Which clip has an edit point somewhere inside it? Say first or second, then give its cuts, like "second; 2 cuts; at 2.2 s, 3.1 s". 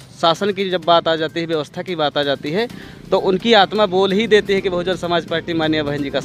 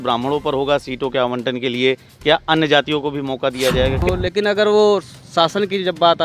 second; 1 cut; at 4.0 s